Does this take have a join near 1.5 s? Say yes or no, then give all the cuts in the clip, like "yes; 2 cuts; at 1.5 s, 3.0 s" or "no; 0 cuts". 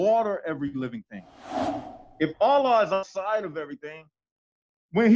yes; 1 cut; at 1.5 s